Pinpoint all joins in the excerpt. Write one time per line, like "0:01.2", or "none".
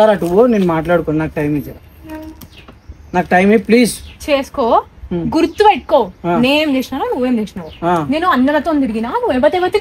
none

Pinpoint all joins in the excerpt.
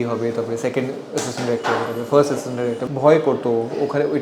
0:02.8

